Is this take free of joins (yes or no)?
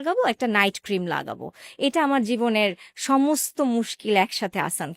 yes